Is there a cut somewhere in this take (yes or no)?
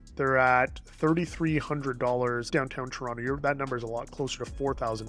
yes